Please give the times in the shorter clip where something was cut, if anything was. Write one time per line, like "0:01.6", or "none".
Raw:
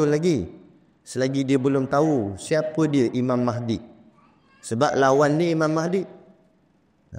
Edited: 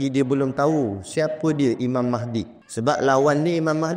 0:02.6